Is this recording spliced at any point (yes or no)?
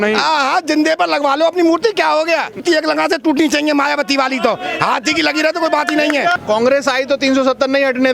yes